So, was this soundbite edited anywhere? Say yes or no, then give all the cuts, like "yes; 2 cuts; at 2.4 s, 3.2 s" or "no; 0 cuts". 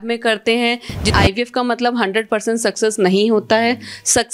yes; 1 cut; at 1.1 s